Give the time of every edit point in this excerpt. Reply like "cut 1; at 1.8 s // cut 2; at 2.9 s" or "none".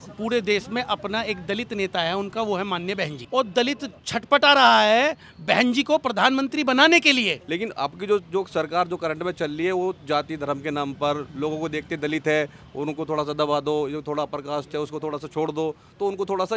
cut 1; at 3.2 s // cut 2; at 7.4 s